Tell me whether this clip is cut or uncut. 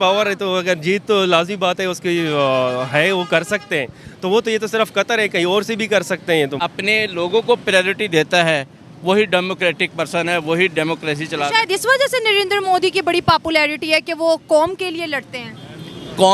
cut